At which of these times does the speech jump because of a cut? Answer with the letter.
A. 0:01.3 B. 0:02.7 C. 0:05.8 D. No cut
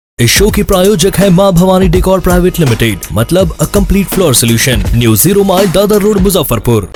D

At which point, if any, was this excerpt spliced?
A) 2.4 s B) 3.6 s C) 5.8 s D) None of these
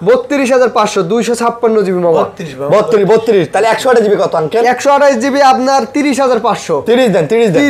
D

